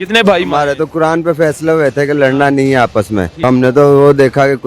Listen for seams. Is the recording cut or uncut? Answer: cut